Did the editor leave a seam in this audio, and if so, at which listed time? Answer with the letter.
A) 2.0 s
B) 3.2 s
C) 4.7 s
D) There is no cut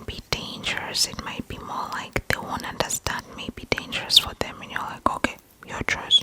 B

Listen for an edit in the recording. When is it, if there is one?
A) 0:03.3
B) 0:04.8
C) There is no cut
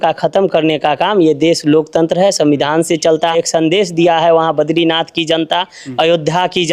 A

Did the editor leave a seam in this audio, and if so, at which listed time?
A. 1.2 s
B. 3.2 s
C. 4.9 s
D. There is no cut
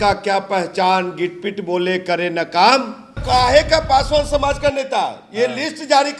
B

